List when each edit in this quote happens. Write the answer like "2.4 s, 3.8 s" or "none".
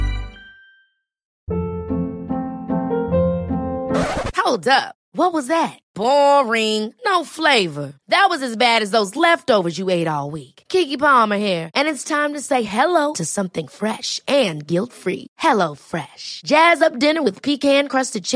1.3 s